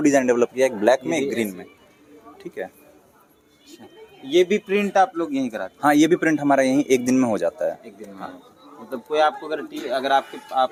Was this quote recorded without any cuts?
yes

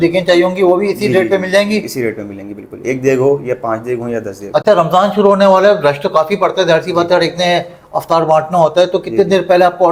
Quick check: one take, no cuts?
yes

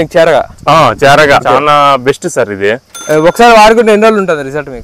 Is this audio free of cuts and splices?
no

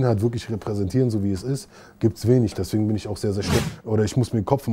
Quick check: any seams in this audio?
yes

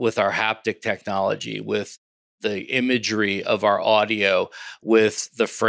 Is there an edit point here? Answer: no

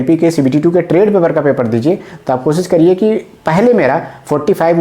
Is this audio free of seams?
yes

